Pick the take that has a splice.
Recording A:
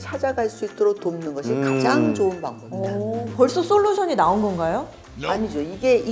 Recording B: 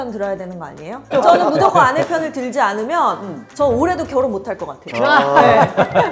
B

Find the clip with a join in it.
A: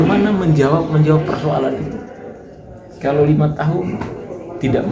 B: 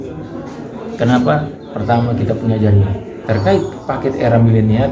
B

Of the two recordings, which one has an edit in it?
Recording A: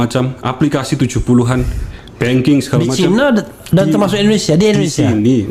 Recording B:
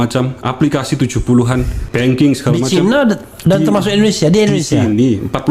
B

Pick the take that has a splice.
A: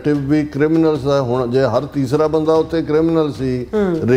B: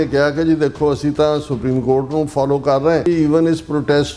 B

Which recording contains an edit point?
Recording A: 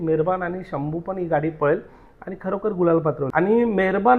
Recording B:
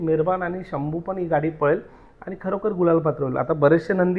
A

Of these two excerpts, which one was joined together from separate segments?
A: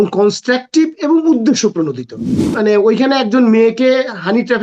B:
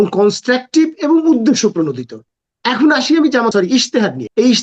A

